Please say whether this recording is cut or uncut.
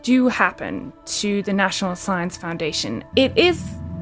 cut